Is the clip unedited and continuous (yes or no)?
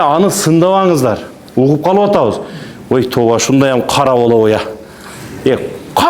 yes